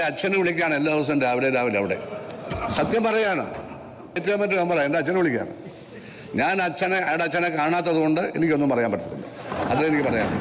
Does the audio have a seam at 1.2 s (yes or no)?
no